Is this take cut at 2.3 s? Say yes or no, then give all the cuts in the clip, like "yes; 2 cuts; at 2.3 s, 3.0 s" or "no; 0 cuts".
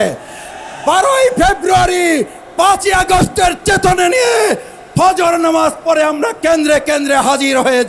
no; 0 cuts